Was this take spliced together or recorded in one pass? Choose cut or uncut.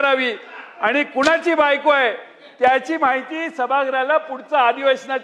uncut